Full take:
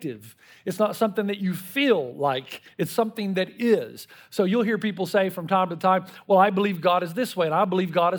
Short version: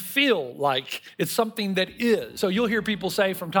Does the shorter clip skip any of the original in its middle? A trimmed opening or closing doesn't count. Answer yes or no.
yes